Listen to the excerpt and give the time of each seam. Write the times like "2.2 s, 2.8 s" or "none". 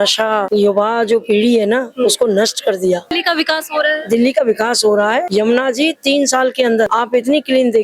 3.1 s, 5.3 s, 6.9 s